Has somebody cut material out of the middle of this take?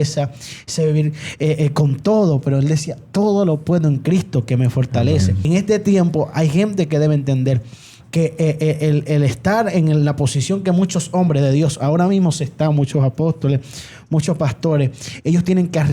yes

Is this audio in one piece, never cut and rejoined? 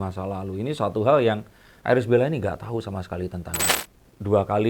no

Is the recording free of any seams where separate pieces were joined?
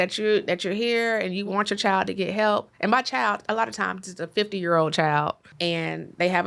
no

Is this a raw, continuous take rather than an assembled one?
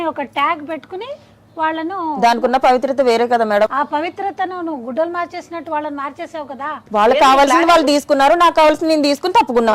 no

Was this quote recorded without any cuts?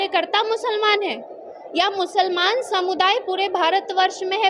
yes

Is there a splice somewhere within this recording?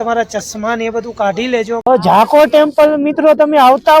yes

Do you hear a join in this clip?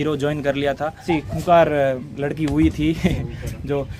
yes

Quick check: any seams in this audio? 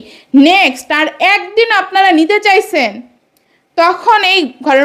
no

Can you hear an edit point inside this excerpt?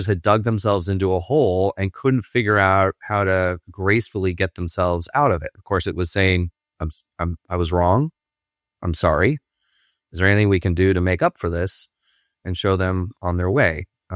no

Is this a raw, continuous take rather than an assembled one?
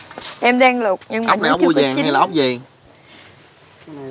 yes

